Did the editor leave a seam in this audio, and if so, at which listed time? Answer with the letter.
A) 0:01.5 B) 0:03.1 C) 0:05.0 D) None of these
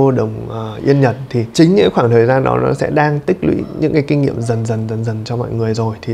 A